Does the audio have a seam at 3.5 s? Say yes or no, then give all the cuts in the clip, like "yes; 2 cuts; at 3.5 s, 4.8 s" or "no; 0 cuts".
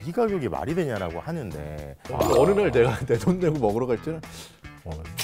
no; 1 cut; at 2.0 s